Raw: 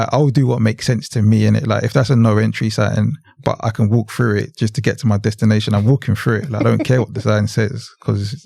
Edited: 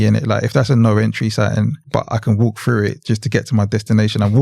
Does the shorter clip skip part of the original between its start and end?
yes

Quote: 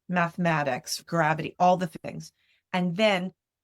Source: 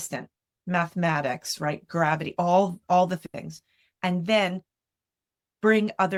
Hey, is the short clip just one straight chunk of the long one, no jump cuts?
no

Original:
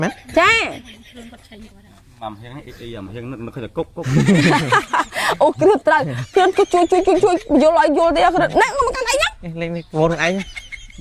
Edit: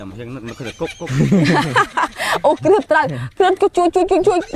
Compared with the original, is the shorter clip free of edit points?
yes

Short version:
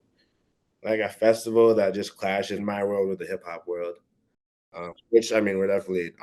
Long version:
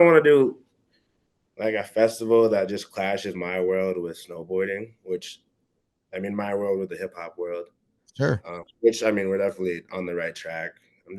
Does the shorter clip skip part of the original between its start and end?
yes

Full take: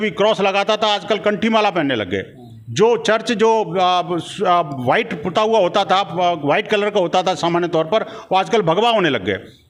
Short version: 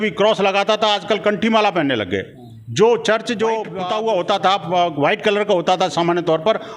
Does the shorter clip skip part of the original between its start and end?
yes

